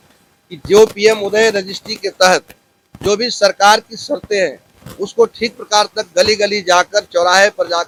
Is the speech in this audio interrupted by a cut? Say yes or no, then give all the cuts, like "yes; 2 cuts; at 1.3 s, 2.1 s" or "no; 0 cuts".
no; 0 cuts